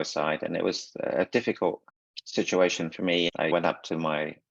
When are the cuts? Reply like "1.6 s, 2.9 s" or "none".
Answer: 3.3 s

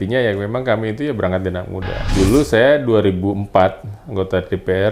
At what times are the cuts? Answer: 2.0 s

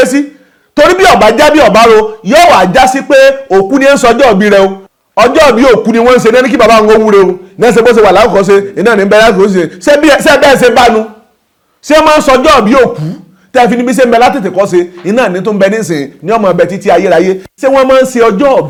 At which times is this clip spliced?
none

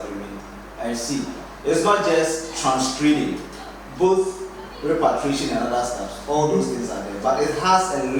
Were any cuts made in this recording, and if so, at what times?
none

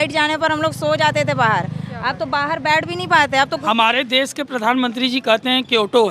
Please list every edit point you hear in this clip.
3.6 s

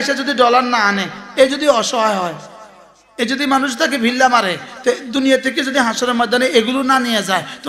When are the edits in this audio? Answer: none

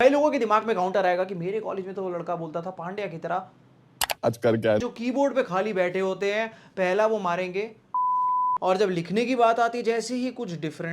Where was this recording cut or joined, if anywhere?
4.8 s

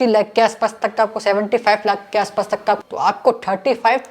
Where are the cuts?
2.8 s

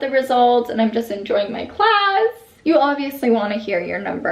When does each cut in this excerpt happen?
2.5 s

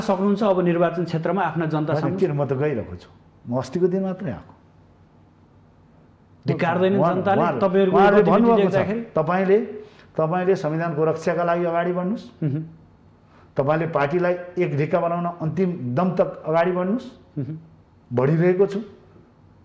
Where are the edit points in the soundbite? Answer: none

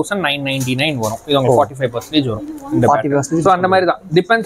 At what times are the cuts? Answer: none

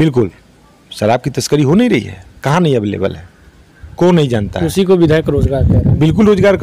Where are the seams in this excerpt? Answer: none

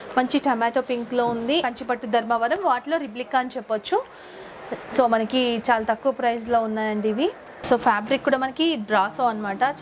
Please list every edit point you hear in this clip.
1.6 s, 7.6 s

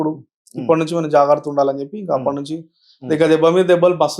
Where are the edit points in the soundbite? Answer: none

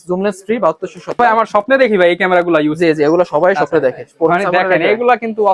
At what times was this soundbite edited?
1.2 s

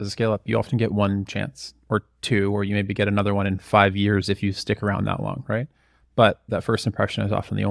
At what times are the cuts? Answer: none

